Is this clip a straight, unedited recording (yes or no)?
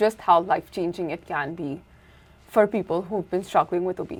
yes